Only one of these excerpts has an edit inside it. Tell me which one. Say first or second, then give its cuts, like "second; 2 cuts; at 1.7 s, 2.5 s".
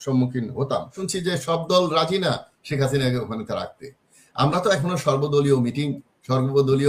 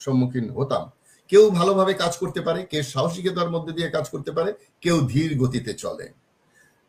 first; 1 cut; at 1.0 s